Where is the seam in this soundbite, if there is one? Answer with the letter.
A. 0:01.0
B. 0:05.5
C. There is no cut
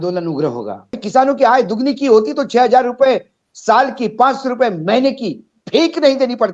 A